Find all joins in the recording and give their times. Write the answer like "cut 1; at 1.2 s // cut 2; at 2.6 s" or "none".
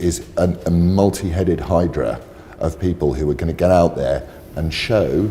none

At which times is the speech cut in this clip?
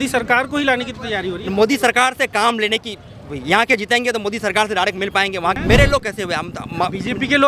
cut 1; at 5.6 s

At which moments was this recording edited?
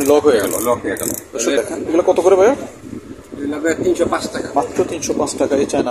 cut 1; at 1.6 s

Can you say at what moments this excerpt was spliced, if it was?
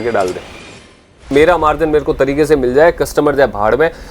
cut 1; at 1.1 s

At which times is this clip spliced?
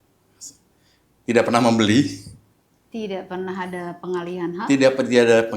none

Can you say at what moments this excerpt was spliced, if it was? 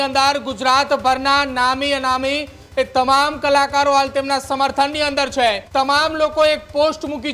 cut 1; at 5.6 s

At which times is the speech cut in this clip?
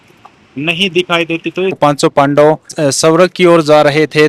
cut 1; at 1.8 s // cut 2; at 2.7 s

